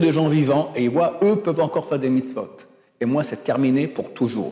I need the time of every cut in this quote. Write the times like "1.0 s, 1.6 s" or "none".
none